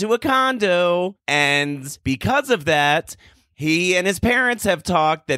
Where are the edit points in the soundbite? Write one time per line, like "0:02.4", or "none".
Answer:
0:01.2